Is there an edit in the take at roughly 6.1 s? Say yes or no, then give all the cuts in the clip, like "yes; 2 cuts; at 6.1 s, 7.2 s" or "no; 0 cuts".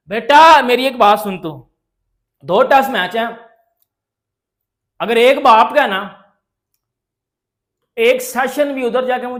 no; 0 cuts